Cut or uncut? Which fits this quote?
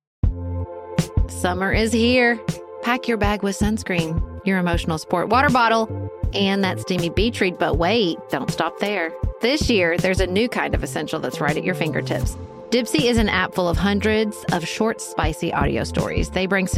cut